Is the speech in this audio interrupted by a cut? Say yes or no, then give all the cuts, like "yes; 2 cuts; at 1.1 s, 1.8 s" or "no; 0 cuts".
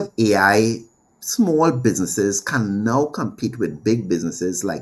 no; 0 cuts